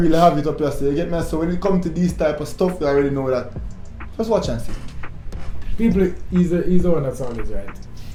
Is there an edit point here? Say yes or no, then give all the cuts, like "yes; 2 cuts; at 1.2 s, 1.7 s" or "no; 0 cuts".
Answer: no; 0 cuts